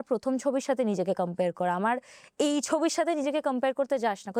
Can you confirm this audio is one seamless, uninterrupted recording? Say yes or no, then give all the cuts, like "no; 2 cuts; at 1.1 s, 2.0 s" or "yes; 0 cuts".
yes; 0 cuts